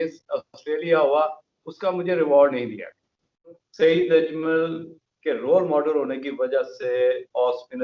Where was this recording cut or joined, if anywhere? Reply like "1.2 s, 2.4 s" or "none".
3.6 s